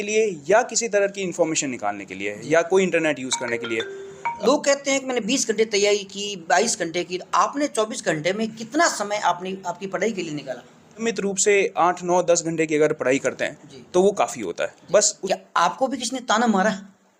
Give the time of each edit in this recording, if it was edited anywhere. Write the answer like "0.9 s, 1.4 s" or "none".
4.3 s, 11.0 s, 15.2 s